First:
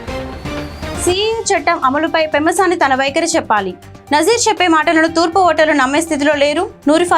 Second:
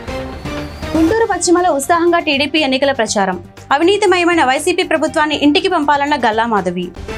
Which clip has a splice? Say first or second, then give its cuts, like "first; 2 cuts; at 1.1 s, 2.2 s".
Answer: first; 1 cut; at 0.9 s